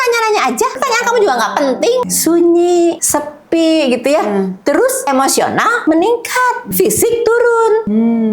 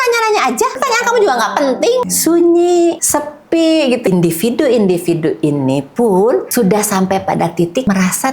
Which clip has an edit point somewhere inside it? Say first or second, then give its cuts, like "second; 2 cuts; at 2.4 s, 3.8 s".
second; 1 cut; at 4.1 s